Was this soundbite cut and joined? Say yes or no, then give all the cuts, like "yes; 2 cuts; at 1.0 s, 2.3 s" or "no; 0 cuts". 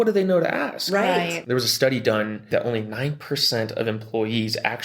yes; 2 cuts; at 1.4 s, 2.4 s